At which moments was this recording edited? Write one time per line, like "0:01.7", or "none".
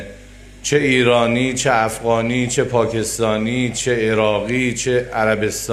none